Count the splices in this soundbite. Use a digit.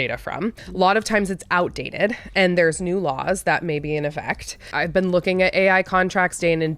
1